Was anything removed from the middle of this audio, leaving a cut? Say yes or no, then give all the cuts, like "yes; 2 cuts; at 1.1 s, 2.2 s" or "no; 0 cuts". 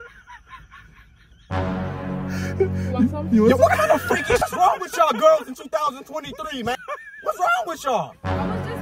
yes; 2 cuts; at 4.4 s, 6.8 s